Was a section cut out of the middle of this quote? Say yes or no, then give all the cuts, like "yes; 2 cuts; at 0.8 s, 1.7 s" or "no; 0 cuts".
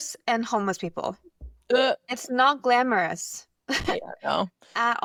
no; 0 cuts